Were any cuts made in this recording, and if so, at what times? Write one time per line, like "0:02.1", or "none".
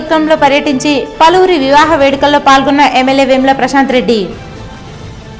none